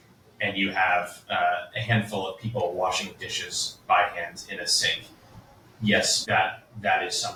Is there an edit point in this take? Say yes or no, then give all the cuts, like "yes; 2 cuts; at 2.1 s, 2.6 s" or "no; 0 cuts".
no; 0 cuts